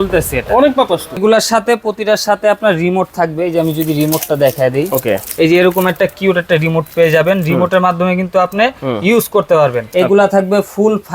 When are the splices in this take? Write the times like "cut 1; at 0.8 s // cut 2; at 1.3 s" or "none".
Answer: cut 1; at 1.2 s // cut 2; at 9.8 s